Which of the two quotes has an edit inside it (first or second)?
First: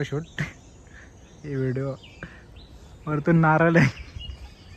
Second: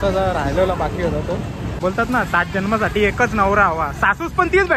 second